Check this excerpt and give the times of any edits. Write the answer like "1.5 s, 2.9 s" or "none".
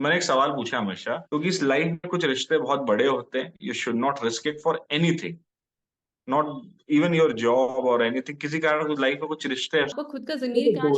1.2 s, 9.9 s